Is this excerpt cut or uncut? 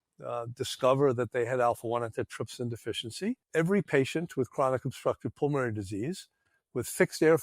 cut